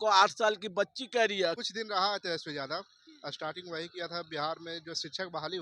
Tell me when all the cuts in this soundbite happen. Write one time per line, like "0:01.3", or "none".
0:01.6